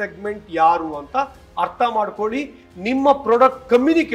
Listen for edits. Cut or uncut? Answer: uncut